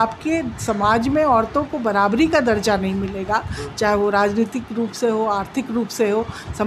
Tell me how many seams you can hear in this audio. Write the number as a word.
zero